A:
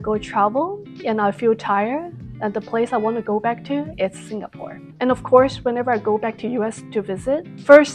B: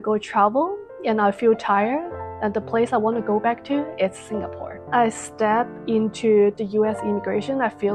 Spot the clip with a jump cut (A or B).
B